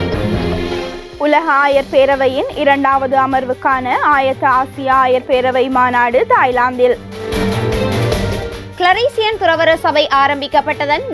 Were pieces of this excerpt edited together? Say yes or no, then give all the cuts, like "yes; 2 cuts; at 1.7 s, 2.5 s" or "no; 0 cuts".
yes; 1 cut; at 1.0 s